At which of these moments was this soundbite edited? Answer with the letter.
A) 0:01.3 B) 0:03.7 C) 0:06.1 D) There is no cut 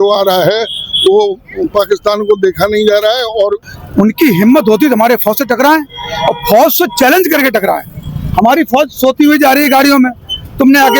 B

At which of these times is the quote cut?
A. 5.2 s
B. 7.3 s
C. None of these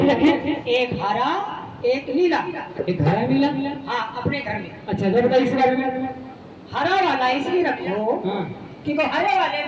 C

